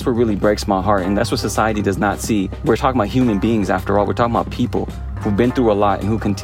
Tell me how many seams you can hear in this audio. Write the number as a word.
two